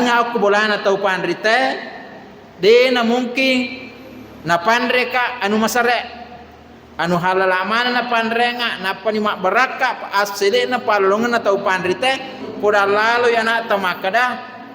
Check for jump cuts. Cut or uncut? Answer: cut